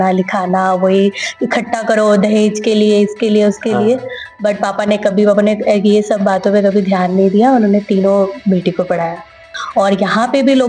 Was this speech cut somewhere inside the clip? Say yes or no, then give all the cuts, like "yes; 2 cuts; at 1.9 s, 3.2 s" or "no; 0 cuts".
yes; 1 cut; at 9.6 s